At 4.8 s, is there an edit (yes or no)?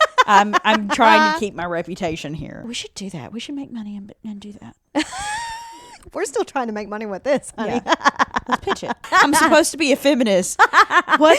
no